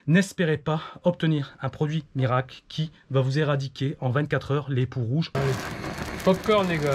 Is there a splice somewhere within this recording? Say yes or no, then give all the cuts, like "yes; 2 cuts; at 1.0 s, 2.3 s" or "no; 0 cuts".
yes; 1 cut; at 5.3 s